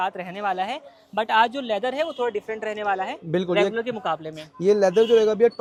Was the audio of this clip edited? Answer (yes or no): no